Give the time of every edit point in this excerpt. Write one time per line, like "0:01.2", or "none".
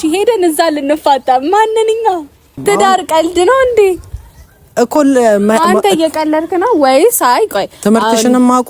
0:02.5

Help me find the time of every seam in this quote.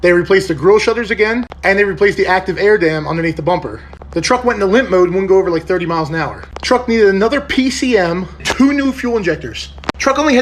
0:03.9
0:06.5
0:08.4

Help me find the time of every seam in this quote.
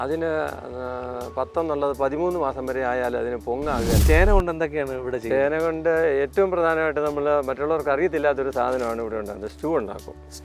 0:04.0

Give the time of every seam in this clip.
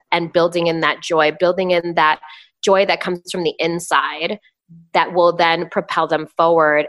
none

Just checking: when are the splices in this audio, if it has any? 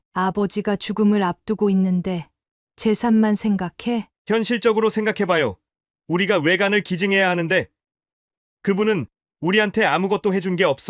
none

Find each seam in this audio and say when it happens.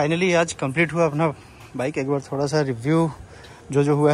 none

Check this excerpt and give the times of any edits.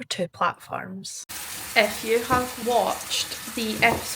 0:01.2
0:02.5

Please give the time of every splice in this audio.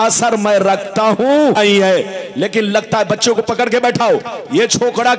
0:01.6

